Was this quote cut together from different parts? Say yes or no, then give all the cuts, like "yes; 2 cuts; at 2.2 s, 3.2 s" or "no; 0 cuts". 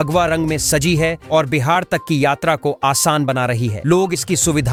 no; 0 cuts